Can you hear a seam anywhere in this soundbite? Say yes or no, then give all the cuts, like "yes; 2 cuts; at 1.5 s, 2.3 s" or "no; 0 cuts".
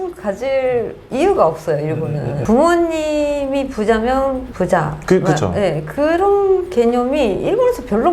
yes; 1 cut; at 2.4 s